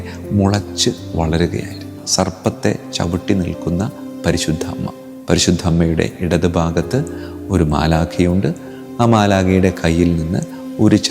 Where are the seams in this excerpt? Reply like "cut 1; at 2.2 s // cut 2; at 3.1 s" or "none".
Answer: cut 1; at 2.0 s